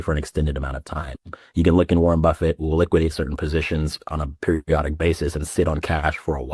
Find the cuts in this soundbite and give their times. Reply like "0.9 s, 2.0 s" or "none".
4.0 s